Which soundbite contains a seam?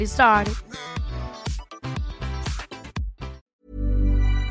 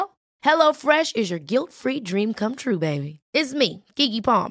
first; 1 cut; at 3.4 s

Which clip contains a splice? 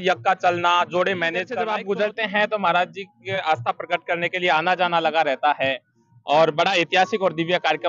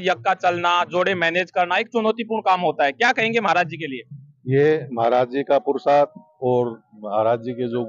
first; 1 cut; at 1.6 s

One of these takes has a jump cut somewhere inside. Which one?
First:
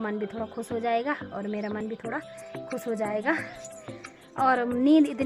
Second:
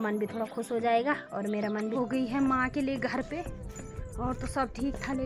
second; 1 cut; at 1.9 s

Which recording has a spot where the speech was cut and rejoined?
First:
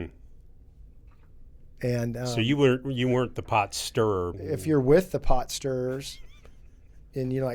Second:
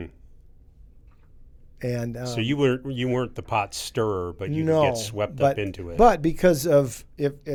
first; 1 cut; at 4.4 s

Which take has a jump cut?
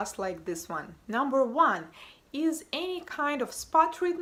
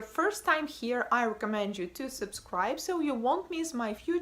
second; 1 cut; at 1.2 s

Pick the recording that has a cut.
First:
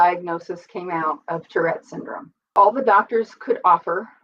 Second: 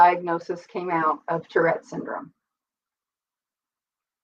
first; 1 cut; at 2.5 s

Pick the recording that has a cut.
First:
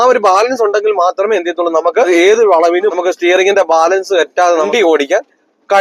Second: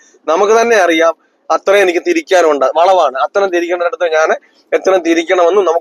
first; 3 cuts; at 2.1 s, 3.0 s, 4.7 s

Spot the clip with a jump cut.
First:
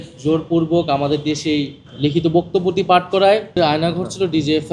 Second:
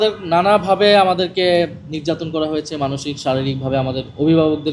first; 2 cuts; at 1.8 s, 3.5 s

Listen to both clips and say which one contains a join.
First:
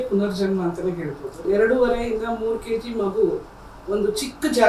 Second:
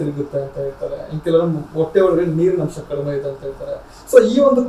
first; 1 cut; at 1.4 s

